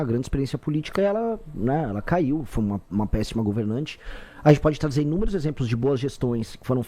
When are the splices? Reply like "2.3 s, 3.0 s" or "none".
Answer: none

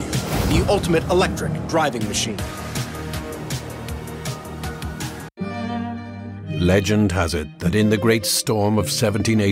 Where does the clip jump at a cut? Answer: 5.2 s

